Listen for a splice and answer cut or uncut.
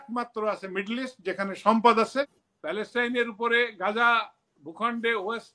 cut